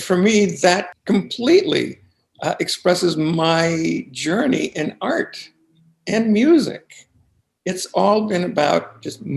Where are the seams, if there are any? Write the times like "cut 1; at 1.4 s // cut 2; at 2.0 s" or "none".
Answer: cut 1; at 0.9 s

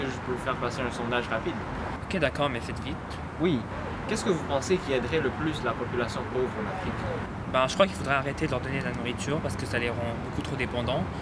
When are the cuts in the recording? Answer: cut 1; at 3.7 s

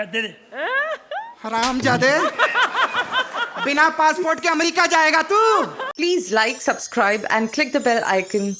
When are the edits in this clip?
cut 1; at 5.8 s

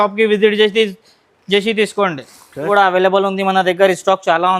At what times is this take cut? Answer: cut 1; at 2.7 s

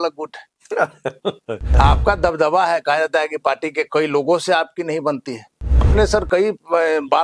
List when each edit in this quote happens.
cut 1; at 1.7 s // cut 2; at 5.9 s

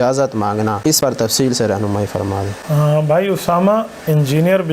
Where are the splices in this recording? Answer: cut 1; at 0.9 s // cut 2; at 2.6 s

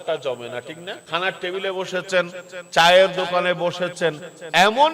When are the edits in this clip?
cut 1; at 1.0 s

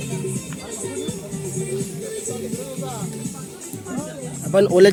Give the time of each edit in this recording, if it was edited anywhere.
none

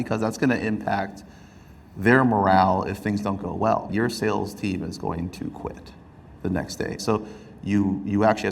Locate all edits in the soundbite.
cut 1; at 3.9 s // cut 2; at 7.0 s

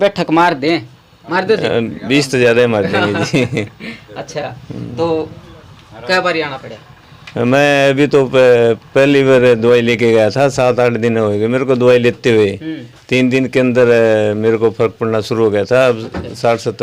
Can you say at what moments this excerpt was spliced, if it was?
none

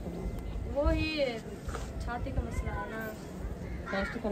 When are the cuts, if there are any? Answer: none

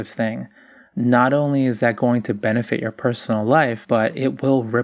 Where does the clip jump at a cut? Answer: cut 1; at 3.8 s

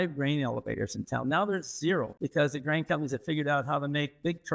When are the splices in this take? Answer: cut 1; at 2.2 s

